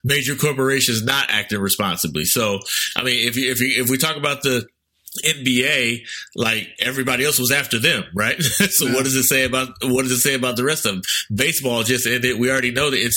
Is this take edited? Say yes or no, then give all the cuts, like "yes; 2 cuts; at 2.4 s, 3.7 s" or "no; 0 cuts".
no; 0 cuts